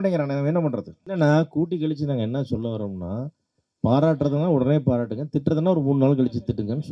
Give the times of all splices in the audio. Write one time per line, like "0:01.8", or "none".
0:01.0

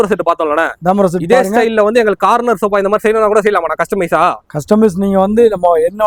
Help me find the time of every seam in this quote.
none

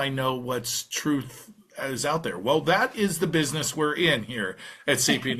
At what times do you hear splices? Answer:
none

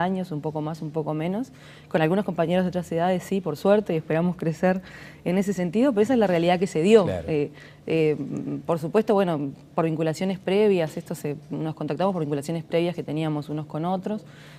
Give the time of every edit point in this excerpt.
none

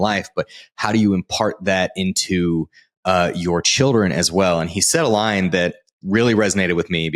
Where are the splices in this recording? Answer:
0:05.9

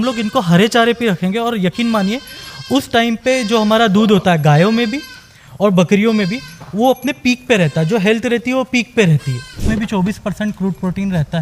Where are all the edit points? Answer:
0:09.5

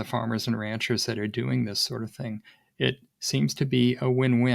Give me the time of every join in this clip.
none

